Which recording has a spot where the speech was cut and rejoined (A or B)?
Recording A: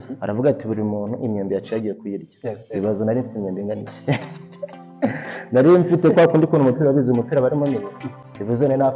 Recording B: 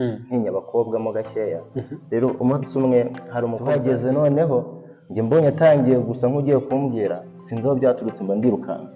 B